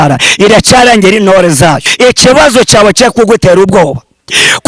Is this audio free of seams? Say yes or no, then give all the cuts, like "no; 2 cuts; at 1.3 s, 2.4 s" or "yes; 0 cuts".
no; 1 cut; at 1.9 s